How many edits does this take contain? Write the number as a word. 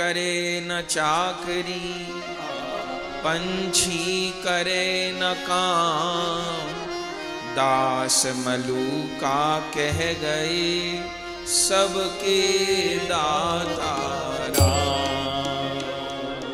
zero